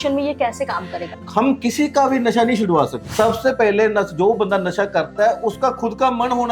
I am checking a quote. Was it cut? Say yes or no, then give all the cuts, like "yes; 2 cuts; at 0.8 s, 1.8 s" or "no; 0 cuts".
yes; 2 cuts; at 1.2 s, 3.0 s